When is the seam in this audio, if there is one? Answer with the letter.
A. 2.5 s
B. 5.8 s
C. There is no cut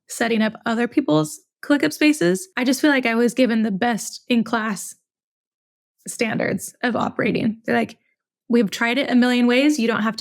A